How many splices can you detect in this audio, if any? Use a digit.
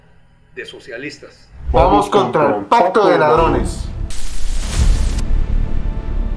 1